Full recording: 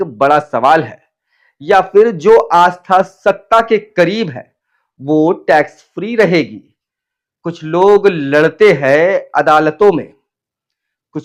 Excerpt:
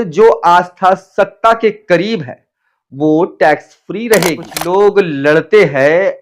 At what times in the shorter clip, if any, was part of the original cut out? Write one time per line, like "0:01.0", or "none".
0:04.5